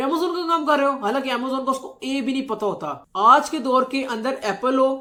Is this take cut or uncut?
uncut